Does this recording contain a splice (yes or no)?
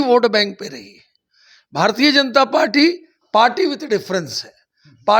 no